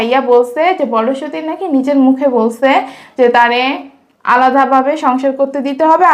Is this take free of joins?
yes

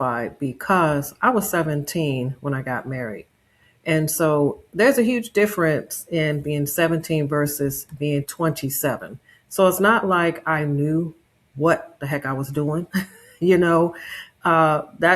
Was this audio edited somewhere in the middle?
no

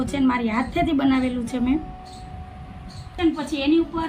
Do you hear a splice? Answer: yes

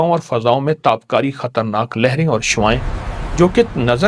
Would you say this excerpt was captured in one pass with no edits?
yes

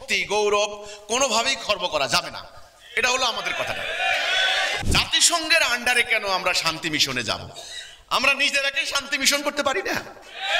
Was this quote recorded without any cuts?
no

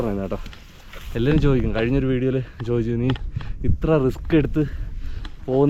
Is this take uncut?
yes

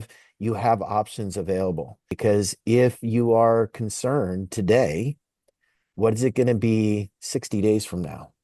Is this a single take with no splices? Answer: no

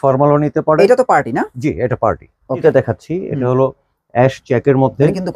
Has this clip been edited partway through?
yes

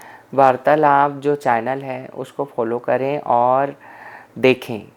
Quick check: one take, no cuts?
yes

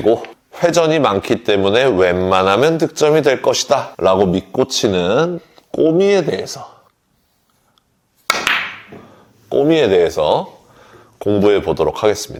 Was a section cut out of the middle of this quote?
no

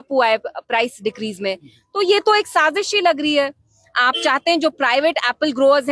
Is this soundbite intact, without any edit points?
yes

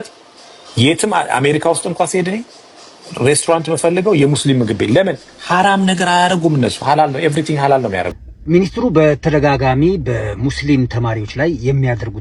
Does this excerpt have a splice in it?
yes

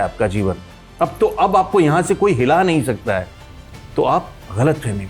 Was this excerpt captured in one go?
yes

